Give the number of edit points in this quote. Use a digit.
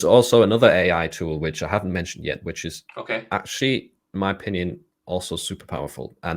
0